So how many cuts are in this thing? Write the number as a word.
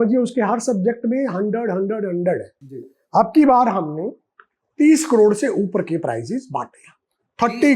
one